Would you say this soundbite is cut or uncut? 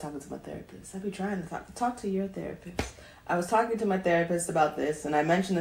uncut